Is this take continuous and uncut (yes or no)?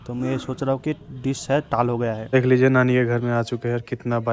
no